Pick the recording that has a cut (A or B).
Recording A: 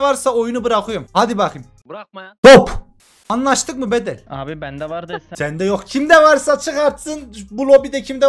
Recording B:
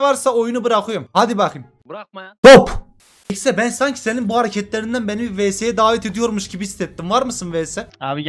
B